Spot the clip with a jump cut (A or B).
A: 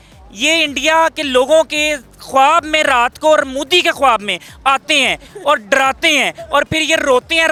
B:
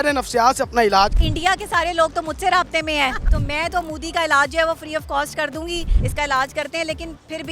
B